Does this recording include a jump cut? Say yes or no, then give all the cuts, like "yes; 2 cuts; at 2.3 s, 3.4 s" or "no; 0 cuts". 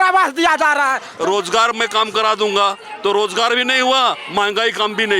yes; 1 cut; at 1.1 s